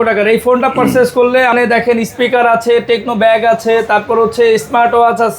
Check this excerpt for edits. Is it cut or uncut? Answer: cut